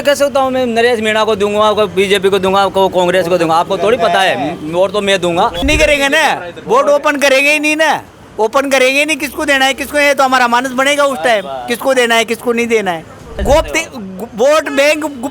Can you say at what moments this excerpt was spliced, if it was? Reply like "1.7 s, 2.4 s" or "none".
5.6 s, 13.4 s